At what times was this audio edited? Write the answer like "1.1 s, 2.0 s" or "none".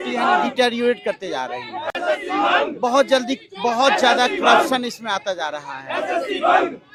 none

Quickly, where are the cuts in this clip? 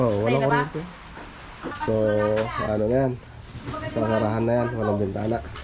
1.8 s

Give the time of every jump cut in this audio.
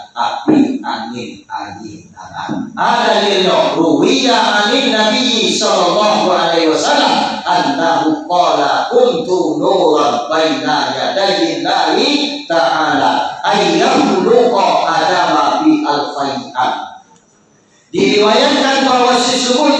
3.7 s

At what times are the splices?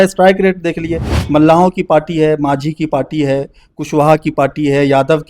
1.2 s

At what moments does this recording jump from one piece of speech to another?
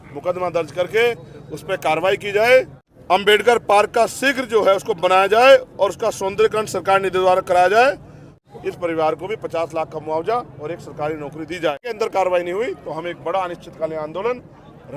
2.8 s, 8.4 s, 11.9 s

